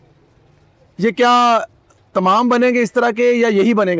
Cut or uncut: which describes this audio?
uncut